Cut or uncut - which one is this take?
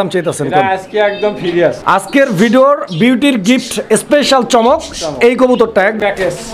cut